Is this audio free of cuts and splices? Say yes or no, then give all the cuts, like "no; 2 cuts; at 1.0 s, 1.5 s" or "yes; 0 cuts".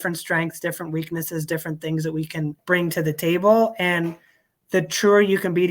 no; 1 cut; at 2.6 s